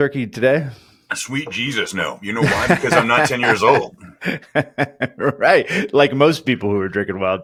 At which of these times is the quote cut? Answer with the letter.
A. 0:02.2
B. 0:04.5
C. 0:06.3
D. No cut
D